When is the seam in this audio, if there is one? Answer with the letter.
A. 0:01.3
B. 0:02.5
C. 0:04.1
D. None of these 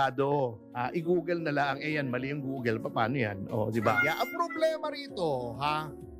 C